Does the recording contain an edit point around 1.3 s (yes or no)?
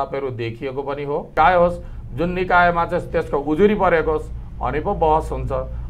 yes